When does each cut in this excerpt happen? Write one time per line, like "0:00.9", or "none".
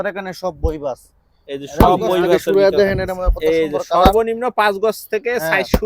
0:02.4